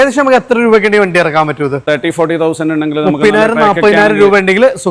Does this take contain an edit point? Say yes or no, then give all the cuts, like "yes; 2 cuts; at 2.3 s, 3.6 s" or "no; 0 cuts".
yes; 1 cut; at 1.8 s